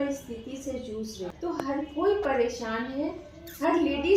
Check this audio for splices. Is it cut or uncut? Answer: cut